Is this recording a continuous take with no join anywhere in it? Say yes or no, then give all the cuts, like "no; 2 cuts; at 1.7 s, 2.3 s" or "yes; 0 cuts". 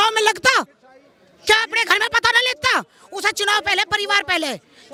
yes; 0 cuts